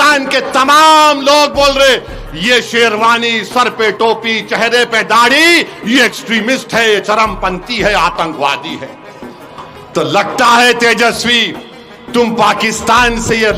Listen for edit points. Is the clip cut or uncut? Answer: uncut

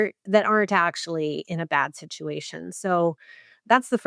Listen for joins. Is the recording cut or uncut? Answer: uncut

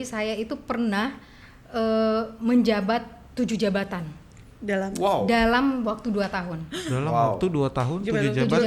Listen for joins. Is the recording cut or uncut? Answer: uncut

